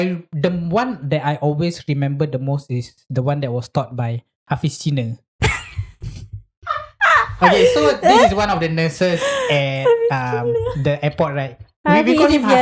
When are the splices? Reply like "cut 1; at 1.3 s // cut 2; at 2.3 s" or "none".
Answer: none